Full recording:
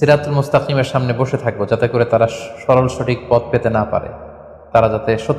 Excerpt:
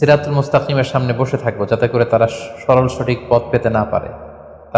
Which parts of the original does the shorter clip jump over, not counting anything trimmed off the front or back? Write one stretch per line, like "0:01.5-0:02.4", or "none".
none